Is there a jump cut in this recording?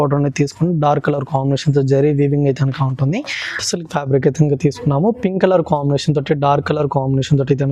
yes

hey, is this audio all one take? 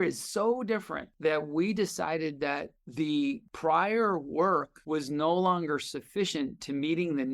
no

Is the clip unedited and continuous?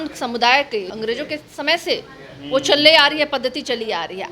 no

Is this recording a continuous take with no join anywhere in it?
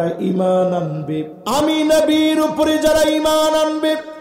no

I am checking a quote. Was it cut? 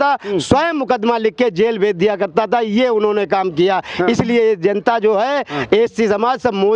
no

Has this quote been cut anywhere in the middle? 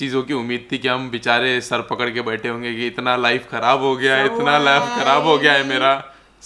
no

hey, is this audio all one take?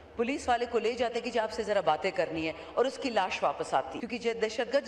no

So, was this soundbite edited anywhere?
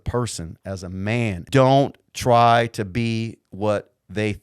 yes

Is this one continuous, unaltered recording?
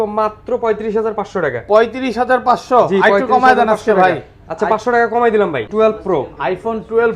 no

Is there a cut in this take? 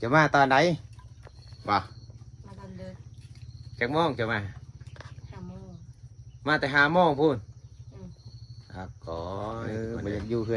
yes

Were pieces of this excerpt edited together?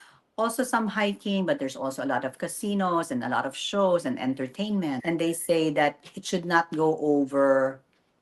yes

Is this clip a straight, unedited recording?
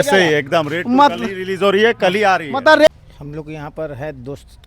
no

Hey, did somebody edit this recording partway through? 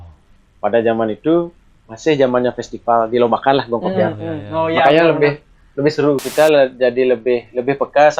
yes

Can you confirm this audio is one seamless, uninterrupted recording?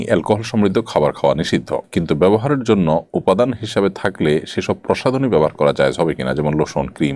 yes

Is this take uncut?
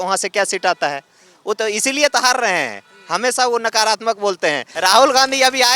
no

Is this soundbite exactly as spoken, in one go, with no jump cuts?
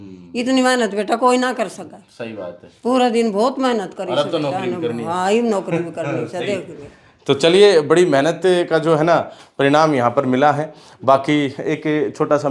yes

